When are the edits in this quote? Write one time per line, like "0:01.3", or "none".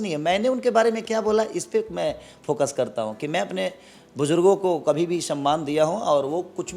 none